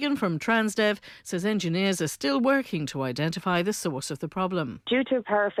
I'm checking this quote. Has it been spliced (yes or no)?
no